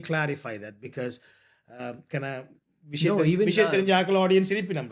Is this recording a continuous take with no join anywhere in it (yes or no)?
yes